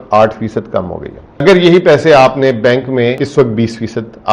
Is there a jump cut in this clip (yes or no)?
yes